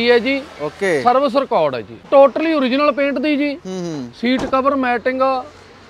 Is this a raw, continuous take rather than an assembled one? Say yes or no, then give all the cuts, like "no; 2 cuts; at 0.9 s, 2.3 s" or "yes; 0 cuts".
no; 1 cut; at 2.0 s